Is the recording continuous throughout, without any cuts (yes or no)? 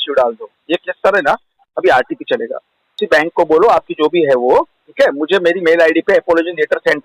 no